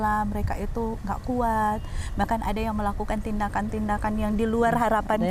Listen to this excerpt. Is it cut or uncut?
uncut